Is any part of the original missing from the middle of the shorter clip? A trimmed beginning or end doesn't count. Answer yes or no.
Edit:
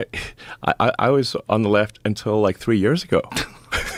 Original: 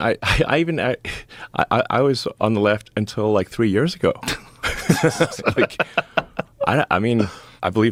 no